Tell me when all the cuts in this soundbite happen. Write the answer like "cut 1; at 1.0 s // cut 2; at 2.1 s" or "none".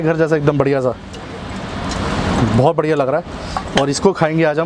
none